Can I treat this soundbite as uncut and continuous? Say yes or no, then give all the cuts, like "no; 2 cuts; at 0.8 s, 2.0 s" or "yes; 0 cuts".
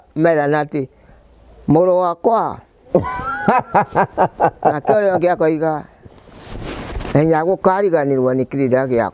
yes; 0 cuts